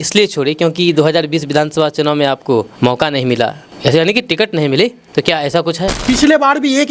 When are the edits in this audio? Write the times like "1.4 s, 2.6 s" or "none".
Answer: 2.7 s, 3.7 s, 5.0 s, 6.0 s